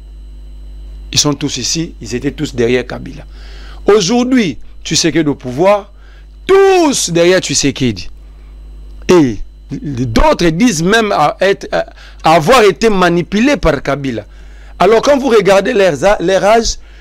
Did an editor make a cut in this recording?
no; 0 cuts

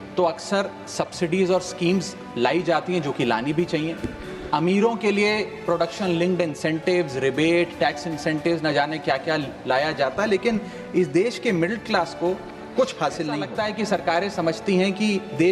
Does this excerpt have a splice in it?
yes; 1 cut; at 13.5 s

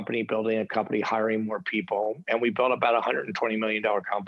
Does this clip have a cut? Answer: no; 0 cuts

